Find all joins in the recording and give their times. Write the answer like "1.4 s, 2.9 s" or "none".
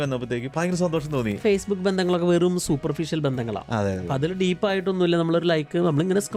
1.4 s